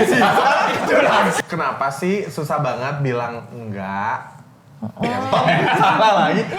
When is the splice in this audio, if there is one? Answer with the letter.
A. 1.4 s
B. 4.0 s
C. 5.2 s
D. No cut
A